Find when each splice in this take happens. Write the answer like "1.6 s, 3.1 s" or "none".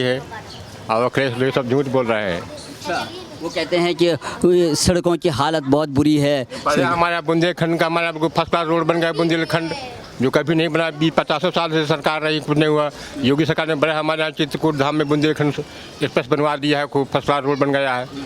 none